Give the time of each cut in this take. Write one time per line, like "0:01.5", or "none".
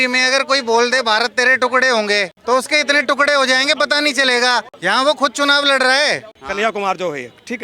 0:02.3
0:04.7
0:06.4